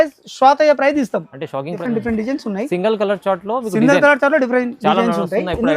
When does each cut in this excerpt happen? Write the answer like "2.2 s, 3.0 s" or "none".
1.8 s